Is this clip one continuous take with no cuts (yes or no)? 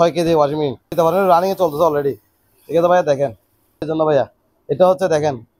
no